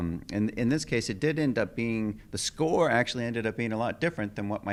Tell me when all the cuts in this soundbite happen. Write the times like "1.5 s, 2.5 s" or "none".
none